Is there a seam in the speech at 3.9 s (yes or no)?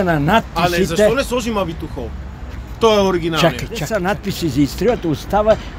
yes